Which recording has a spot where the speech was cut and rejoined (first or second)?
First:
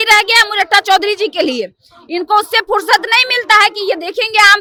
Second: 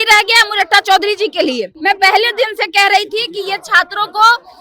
second